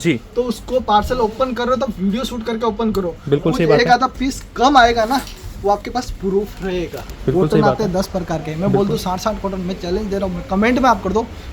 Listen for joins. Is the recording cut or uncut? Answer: cut